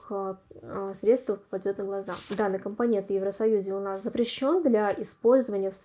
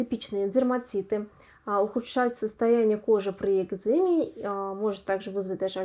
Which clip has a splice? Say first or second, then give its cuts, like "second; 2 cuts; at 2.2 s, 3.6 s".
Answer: first; 1 cut; at 2.2 s